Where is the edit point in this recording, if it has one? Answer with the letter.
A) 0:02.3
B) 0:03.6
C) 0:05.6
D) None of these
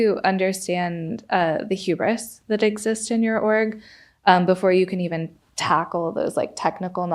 D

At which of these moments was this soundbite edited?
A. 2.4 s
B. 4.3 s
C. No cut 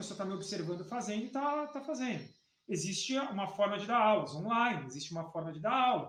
C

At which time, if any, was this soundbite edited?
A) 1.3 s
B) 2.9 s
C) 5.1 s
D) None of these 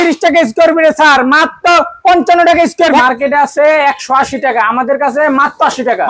B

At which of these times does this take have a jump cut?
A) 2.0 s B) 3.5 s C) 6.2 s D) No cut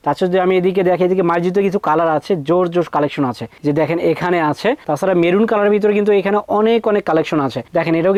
D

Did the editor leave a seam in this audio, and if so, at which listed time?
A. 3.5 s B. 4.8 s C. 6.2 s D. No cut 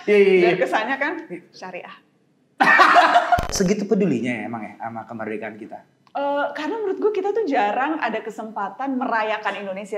A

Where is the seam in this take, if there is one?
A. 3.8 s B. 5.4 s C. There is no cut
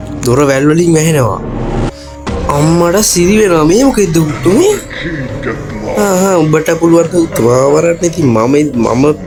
C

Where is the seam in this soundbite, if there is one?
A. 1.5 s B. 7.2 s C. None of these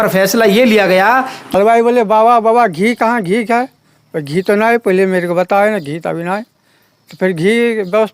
A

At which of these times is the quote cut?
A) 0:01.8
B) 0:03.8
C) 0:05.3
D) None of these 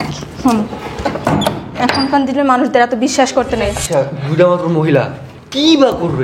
B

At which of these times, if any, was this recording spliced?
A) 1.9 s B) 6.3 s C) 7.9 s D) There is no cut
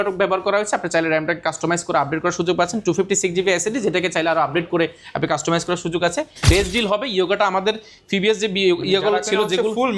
B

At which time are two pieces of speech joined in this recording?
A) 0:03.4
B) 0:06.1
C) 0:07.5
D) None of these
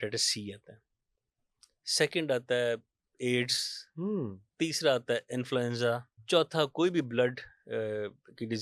B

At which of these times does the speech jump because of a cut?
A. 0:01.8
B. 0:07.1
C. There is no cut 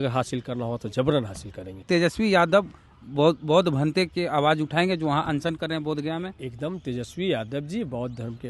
A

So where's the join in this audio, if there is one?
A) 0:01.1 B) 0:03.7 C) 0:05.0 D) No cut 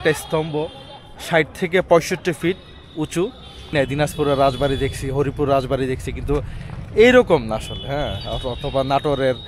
B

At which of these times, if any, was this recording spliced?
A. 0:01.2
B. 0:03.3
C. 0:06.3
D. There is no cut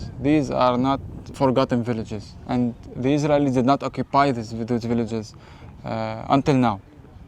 A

